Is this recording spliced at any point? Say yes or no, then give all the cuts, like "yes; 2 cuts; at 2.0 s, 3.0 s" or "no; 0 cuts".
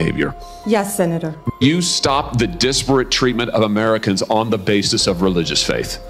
yes; 1 cut; at 1.4 s